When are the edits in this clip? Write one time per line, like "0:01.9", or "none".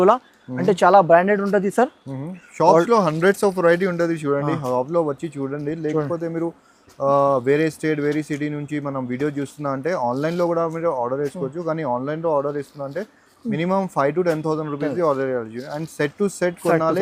none